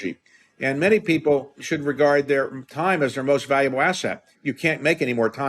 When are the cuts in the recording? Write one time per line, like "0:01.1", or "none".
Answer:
0:01.6